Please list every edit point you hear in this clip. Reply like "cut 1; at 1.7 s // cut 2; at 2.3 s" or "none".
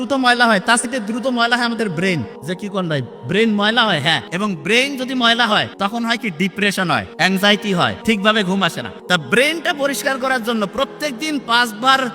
cut 1; at 0.9 s // cut 2; at 2.3 s // cut 3; at 4.3 s // cut 4; at 5.7 s // cut 5; at 7.1 s // cut 6; at 8.0 s // cut 7; at 8.9 s

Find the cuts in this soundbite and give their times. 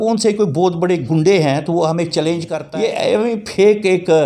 cut 1; at 2.6 s

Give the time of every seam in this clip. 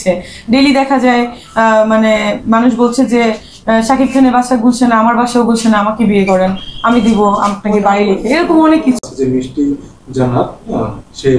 cut 1; at 9.0 s

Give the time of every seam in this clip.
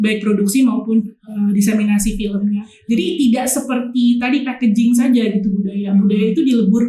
cut 1; at 2.7 s

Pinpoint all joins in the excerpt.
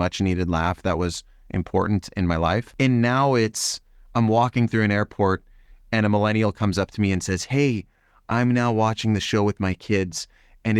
cut 1; at 2.7 s

